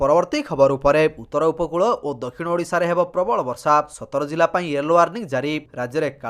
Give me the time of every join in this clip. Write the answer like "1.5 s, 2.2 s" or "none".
1.1 s